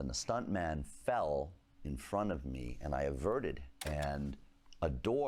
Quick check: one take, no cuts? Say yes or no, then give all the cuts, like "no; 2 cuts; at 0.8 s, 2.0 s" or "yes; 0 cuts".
no; 1 cut; at 3.7 s